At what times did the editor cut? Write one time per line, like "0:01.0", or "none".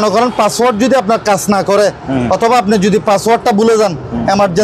none